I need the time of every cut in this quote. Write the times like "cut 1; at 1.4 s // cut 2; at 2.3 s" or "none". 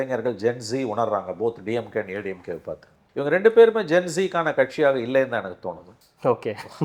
none